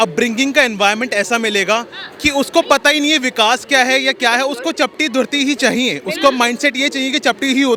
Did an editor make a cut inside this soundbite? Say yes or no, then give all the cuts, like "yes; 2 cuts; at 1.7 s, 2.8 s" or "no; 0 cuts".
no; 0 cuts